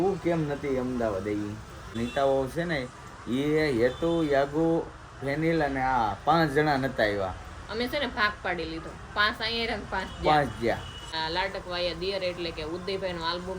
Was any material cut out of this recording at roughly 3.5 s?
no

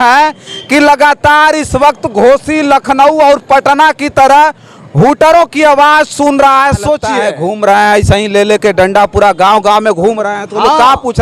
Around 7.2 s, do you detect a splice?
yes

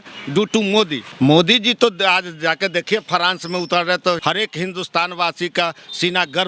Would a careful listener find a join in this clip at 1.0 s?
yes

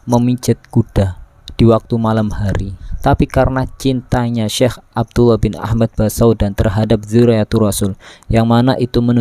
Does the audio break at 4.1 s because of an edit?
no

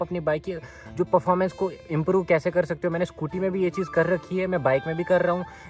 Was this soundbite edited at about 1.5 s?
no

